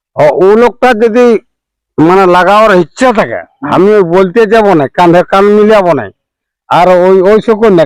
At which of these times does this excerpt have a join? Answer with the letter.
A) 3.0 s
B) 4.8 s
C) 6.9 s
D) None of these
D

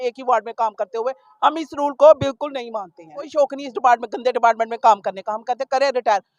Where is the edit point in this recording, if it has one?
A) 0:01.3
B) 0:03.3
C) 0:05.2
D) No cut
B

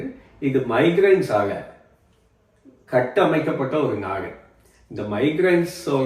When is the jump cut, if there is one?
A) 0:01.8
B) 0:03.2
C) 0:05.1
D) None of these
D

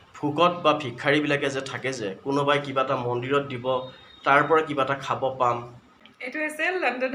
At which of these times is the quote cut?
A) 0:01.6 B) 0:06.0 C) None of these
B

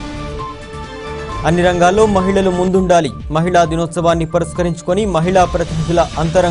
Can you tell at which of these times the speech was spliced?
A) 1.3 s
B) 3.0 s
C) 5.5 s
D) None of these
A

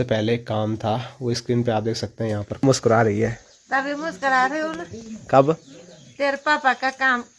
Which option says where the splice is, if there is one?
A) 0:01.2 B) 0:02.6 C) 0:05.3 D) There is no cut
B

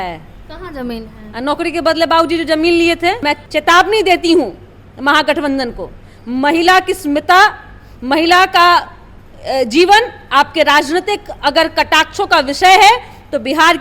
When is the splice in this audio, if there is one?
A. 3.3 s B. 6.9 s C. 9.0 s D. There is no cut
A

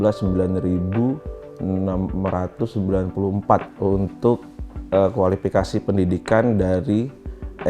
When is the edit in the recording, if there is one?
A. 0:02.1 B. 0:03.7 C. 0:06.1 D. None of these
B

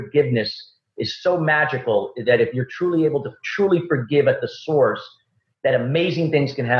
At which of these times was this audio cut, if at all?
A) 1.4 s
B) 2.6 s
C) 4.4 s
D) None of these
D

